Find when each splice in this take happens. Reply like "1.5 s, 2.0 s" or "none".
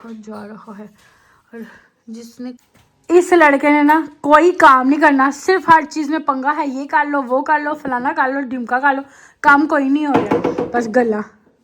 2.6 s